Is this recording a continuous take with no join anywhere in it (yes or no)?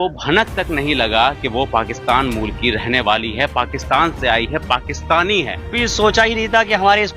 no